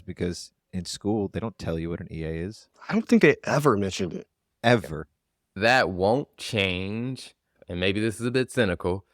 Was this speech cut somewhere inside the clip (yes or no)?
yes